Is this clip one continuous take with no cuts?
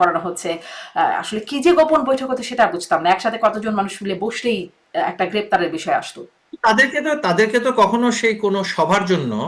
yes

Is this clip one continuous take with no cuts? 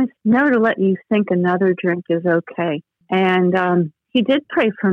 no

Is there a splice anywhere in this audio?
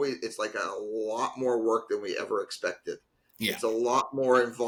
no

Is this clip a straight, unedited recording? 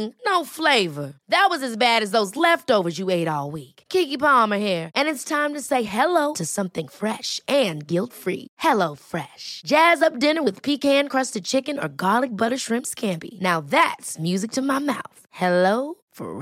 yes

